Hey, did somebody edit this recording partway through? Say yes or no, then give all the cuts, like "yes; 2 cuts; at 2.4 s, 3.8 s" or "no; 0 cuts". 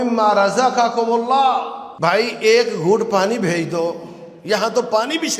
yes; 1 cut; at 1.8 s